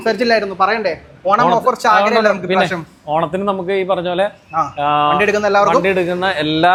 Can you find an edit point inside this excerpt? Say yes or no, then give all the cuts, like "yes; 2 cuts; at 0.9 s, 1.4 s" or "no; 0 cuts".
no; 0 cuts